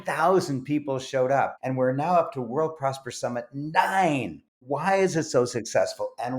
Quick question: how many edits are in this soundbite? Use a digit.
2